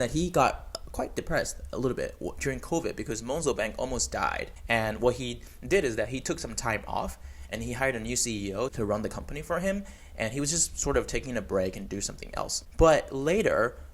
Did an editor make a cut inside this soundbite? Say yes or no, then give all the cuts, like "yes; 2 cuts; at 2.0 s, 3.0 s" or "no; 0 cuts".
yes; 3 cuts; at 4.5 s, 8.7 s, 12.6 s